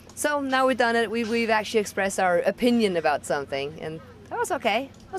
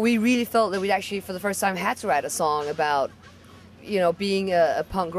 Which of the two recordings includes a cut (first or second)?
second